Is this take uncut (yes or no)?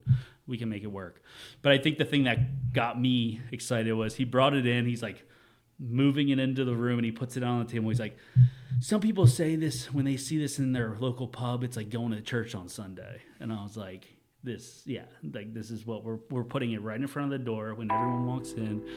yes